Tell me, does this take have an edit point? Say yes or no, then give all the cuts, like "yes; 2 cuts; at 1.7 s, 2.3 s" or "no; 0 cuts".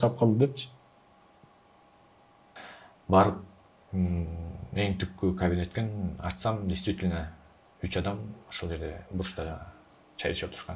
yes; 1 cut; at 2.6 s